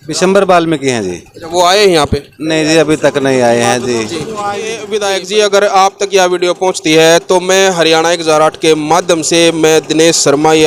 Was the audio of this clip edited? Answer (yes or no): yes